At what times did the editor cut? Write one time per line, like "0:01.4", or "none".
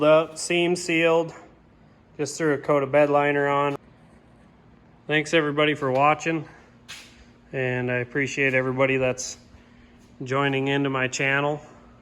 0:03.8